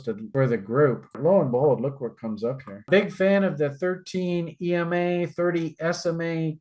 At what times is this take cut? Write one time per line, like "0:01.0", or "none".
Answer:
0:01.2